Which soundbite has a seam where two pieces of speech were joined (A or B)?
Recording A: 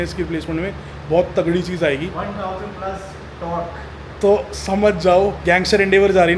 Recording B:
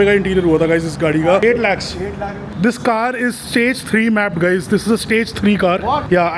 B